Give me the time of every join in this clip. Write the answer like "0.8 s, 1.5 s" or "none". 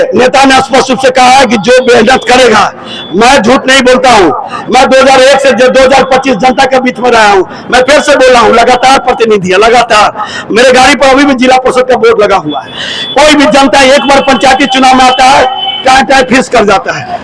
none